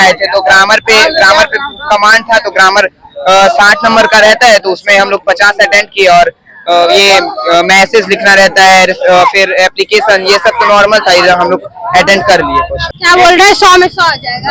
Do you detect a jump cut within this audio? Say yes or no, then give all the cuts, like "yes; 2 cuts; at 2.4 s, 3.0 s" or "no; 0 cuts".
yes; 1 cut; at 12.9 s